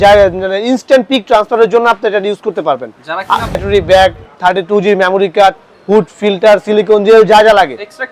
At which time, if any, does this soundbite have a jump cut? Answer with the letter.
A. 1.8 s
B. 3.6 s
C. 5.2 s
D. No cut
B